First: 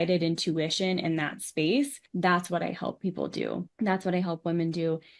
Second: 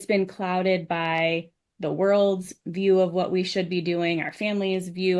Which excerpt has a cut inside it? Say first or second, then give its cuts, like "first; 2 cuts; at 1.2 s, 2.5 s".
first; 2 cuts; at 2.0 s, 3.7 s